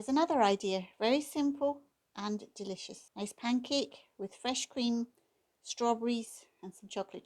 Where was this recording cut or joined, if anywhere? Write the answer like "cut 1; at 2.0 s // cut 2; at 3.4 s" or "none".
cut 1; at 3.0 s

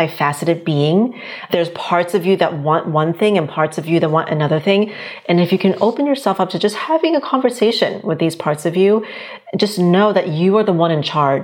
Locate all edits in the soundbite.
none

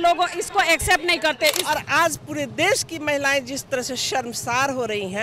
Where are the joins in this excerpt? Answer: cut 1; at 1.6 s

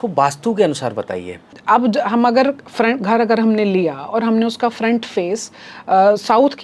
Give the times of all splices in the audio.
cut 1; at 1.5 s

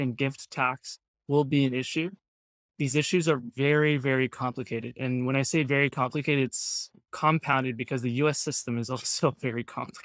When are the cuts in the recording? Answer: cut 1; at 7.0 s

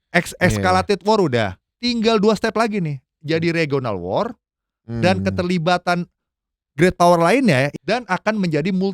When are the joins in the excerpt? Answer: cut 1; at 7.7 s

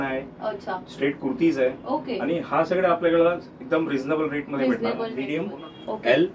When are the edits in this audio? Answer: cut 1; at 5.2 s

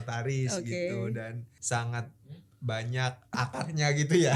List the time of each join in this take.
cut 1; at 1.5 s // cut 2; at 3.3 s

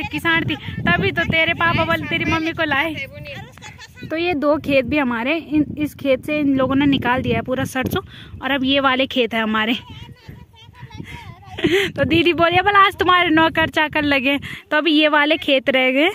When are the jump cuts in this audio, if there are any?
none

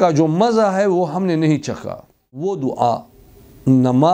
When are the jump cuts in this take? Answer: cut 1; at 2.4 s

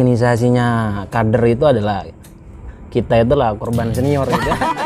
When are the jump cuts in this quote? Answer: none

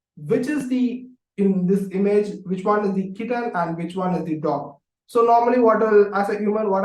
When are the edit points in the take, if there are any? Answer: none

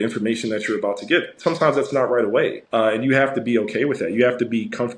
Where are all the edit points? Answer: cut 1; at 2.6 s

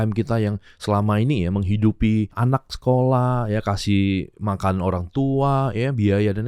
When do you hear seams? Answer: cut 1; at 2.3 s

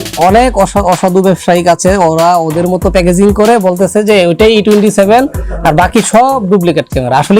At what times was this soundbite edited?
none

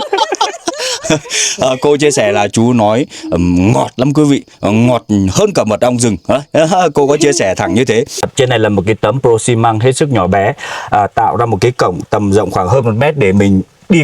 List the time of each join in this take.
cut 1; at 8.3 s

